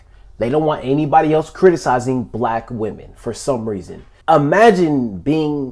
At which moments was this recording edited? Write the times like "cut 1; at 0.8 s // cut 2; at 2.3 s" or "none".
cut 1; at 4.2 s